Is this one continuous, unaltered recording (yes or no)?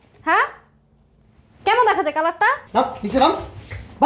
no